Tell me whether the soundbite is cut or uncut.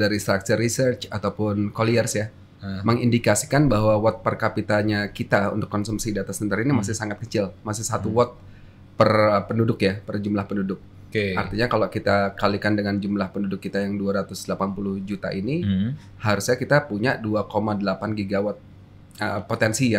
uncut